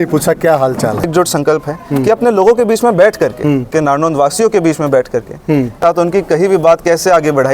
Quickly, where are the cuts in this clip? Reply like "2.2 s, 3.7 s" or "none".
1.1 s, 3.7 s, 5.8 s